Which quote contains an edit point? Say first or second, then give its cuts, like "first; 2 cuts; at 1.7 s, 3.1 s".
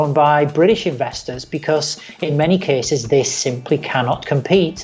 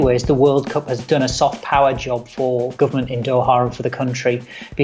second; 2 cuts; at 0.9 s, 2.7 s